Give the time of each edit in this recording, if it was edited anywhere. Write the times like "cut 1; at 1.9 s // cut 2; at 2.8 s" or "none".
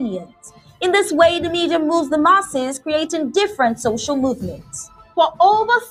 none